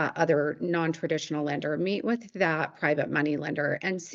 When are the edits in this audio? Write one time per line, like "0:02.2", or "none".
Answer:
none